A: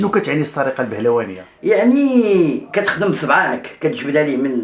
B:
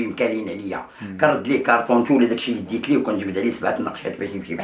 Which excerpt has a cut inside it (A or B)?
A